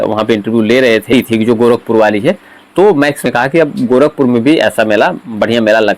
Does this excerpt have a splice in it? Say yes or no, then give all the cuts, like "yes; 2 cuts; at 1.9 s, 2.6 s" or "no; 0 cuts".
yes; 2 cuts; at 1.1 s, 3.2 s